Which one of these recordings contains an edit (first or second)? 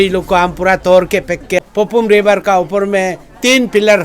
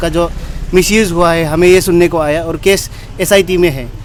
first